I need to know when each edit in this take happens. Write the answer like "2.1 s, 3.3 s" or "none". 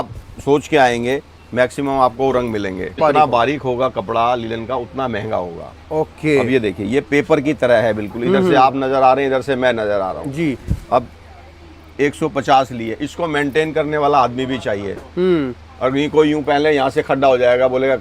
3.0 s